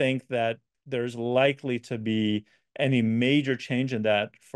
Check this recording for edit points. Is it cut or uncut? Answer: uncut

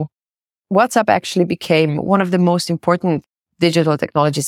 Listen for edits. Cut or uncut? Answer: cut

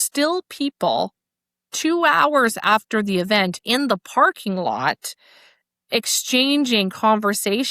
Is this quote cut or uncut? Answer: uncut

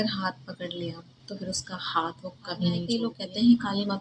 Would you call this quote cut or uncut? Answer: cut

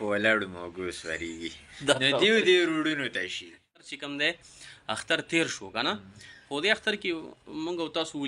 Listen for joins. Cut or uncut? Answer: cut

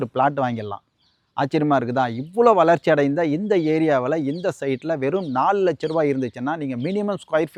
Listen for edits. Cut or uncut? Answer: uncut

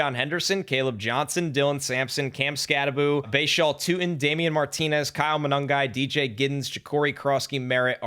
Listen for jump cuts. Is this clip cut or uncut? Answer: cut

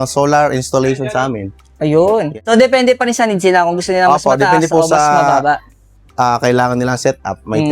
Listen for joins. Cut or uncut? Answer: cut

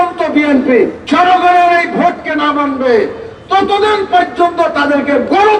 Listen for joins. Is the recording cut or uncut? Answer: cut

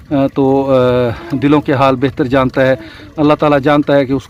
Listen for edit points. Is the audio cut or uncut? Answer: uncut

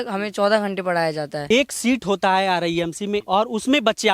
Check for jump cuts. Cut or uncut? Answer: cut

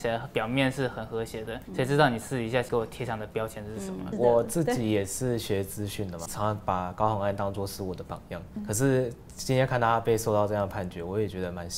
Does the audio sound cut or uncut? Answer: cut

